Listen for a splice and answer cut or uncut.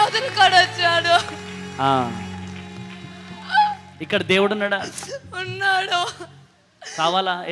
uncut